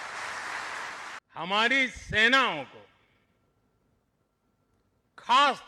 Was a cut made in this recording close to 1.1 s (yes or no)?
yes